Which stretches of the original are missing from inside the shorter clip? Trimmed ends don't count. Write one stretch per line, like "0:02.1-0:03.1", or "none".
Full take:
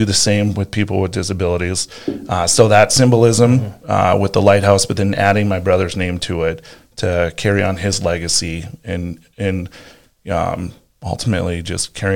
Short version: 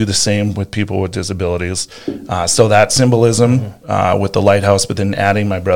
none